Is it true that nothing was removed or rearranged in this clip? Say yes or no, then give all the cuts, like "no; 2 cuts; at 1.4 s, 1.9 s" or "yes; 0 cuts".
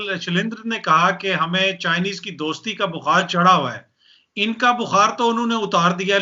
yes; 0 cuts